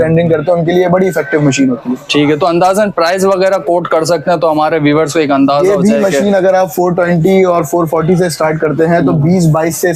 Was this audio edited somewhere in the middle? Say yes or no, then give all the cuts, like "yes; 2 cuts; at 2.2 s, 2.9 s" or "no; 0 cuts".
no; 0 cuts